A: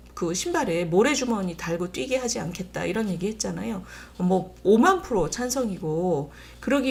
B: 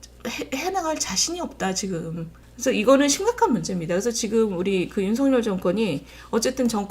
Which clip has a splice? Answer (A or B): B